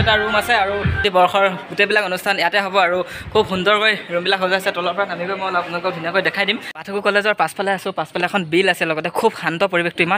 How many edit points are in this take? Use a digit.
2